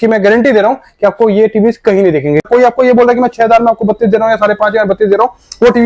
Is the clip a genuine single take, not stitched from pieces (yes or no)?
no